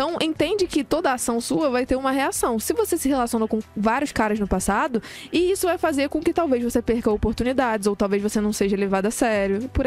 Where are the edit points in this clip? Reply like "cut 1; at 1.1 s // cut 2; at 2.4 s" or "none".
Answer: cut 1; at 5.2 s